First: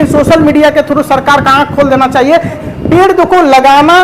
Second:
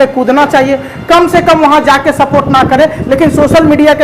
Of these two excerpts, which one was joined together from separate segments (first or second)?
first